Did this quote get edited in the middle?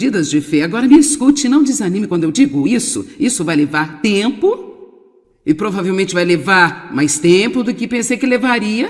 no; 0 cuts

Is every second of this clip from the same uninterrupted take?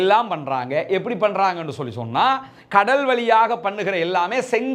yes; 0 cuts

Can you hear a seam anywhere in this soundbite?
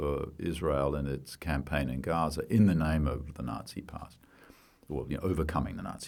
no; 0 cuts

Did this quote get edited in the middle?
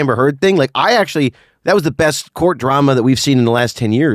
no; 0 cuts

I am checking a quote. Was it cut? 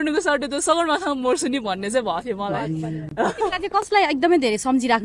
no; 0 cuts

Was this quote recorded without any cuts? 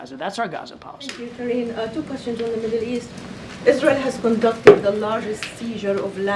no; 1 cut; at 1.2 s

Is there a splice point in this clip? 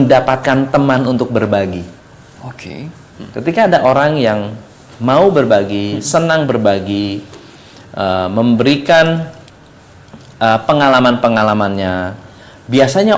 no; 0 cuts

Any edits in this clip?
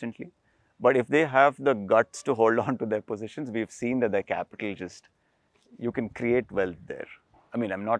no; 0 cuts

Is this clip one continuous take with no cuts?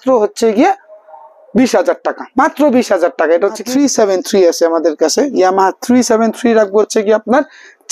no; 1 cut; at 3.6 s

